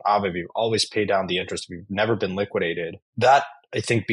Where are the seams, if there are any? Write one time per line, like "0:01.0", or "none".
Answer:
0:03.0